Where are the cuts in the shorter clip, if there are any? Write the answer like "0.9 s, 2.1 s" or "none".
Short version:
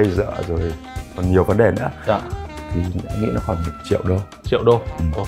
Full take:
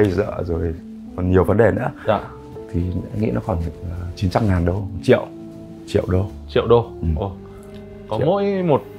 3.7 s